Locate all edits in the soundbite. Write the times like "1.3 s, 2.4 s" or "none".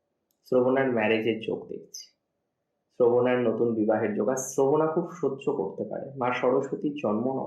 none